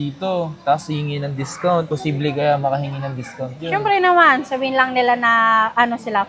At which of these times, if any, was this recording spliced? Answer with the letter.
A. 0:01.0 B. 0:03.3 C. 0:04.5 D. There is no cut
D